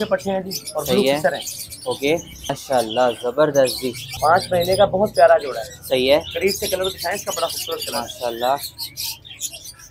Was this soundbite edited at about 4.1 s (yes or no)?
yes